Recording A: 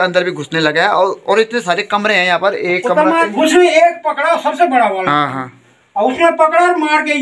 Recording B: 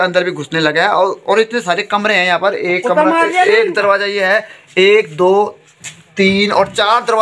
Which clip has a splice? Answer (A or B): A